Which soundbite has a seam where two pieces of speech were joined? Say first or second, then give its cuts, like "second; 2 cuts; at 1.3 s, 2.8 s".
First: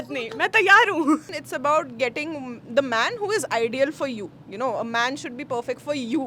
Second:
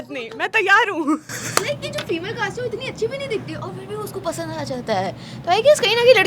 first; 1 cut; at 1.4 s